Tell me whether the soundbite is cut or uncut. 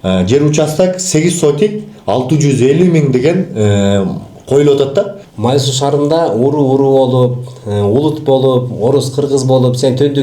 cut